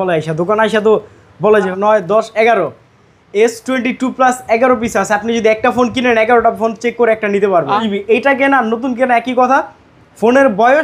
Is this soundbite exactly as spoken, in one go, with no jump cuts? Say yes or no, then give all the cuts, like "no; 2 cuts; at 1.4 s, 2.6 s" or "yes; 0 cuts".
no; 2 cuts; at 1.7 s, 7.8 s